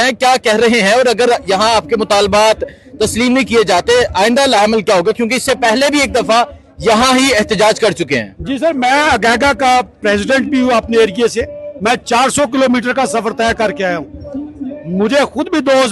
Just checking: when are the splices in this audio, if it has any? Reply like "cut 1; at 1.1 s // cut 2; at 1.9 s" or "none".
cut 1; at 2.1 s